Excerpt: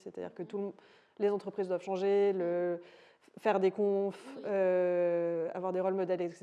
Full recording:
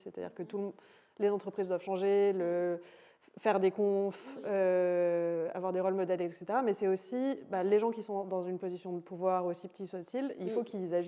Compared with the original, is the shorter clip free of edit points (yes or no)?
yes